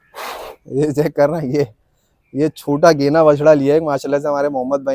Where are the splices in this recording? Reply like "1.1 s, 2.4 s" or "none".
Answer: none